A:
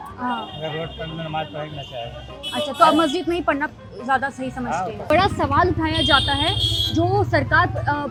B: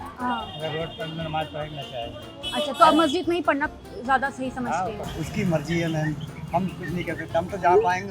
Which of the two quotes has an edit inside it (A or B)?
B